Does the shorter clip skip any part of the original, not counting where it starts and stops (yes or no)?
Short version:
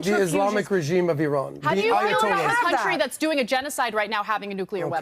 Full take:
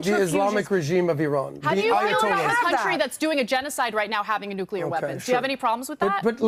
no